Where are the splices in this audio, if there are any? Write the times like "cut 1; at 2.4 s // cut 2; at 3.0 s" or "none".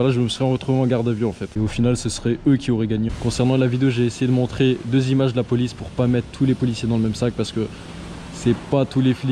cut 1; at 1.5 s